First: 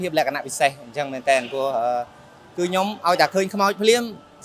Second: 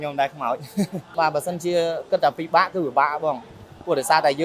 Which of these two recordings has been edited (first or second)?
second